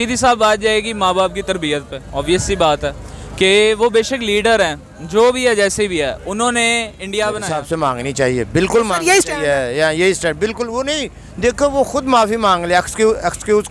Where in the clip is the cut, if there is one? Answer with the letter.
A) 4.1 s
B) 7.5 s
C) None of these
B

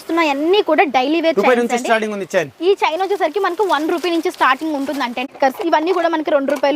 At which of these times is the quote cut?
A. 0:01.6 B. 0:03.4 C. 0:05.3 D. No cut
C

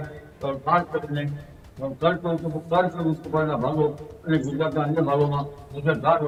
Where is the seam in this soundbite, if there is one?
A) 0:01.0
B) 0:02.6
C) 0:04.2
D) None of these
D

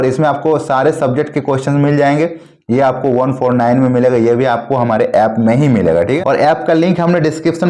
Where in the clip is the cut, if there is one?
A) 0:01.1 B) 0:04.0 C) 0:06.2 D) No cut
C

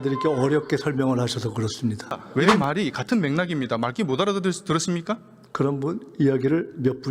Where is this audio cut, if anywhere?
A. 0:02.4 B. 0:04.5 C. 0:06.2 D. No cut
A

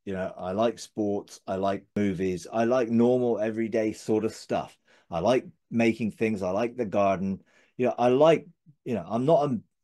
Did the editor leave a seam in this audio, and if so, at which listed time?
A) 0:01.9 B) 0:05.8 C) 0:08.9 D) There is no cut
A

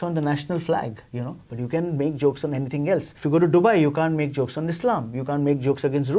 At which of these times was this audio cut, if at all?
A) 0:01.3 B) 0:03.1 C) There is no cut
B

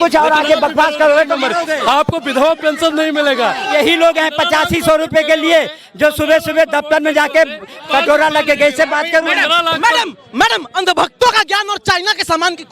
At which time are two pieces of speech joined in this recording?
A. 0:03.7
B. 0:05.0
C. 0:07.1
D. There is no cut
A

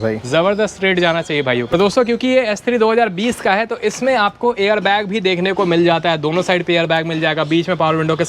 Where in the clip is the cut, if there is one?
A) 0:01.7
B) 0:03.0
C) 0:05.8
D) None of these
A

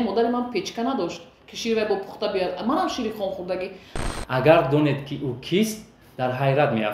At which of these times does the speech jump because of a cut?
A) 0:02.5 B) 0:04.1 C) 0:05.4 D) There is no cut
B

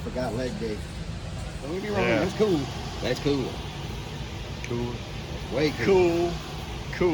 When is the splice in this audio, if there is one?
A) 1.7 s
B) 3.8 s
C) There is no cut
A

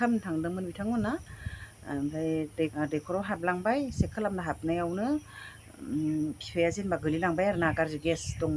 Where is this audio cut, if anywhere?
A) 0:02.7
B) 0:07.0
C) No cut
A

